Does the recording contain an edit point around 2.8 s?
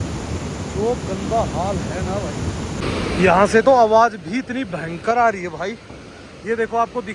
yes; 1 cut; at 2.8 s

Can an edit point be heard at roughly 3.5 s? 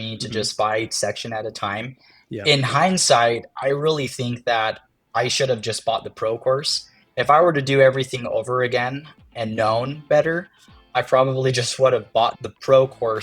yes; 2 cuts; at 3.5 s, 9.3 s

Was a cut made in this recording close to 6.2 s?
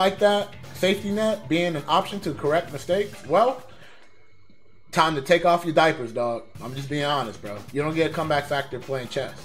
no; 1 cut; at 7.5 s

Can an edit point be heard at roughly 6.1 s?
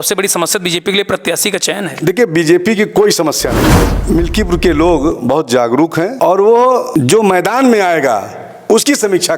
yes; 3 cuts; at 3.9 s, 6.1 s, 6.9 s

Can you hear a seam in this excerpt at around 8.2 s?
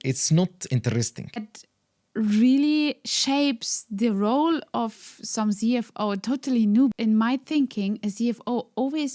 no; 2 cuts; at 1.5 s, 6.9 s

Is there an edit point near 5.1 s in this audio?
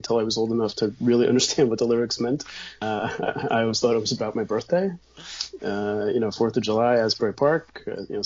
yes; 2 cuts; at 2.8 s, 5.1 s

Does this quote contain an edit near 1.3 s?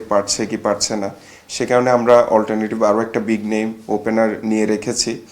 no; 0 cuts

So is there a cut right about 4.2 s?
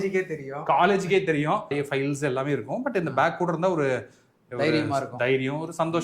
no; 1 cut; at 1.7 s

